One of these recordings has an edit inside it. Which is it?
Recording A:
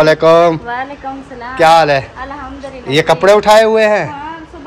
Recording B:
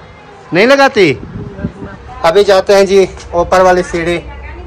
B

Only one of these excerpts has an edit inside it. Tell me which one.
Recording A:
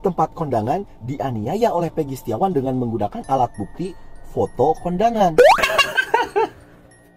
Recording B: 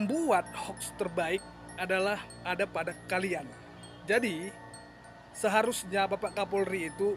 A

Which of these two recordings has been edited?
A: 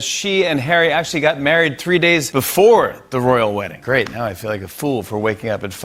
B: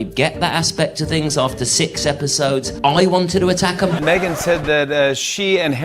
B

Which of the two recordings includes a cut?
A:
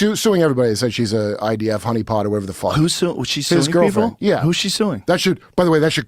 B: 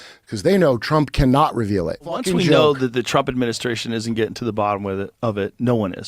B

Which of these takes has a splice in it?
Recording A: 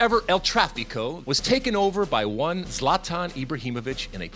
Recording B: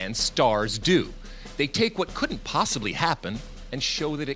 A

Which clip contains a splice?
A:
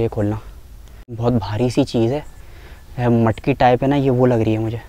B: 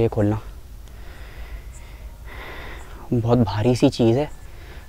A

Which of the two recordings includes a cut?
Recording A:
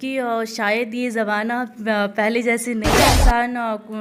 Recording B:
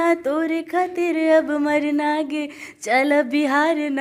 A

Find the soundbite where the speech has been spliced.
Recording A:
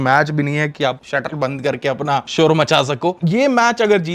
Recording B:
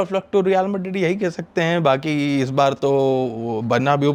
A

